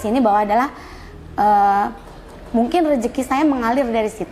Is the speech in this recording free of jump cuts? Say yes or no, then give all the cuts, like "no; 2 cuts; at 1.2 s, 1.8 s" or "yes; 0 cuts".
yes; 0 cuts